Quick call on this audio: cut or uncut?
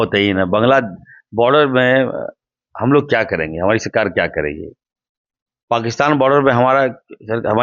uncut